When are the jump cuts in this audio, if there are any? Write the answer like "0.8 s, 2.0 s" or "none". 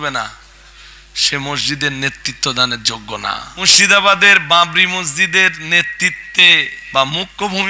3.5 s, 6.8 s